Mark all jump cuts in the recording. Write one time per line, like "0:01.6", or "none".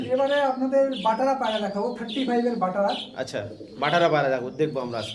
none